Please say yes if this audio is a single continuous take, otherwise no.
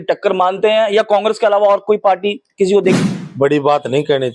yes